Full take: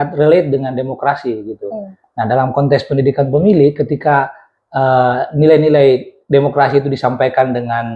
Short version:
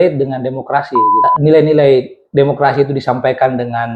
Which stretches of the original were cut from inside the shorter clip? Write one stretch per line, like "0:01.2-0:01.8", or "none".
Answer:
0:01.6-0:05.2